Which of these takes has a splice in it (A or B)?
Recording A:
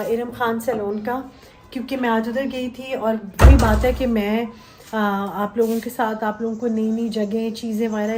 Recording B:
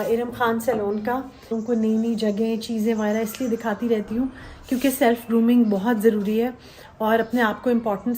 B